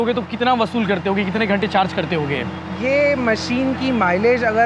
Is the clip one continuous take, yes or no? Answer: yes